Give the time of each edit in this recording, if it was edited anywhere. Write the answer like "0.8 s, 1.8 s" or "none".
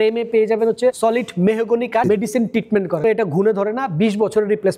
1.0 s, 2.0 s, 3.0 s